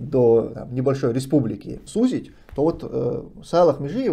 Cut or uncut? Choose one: cut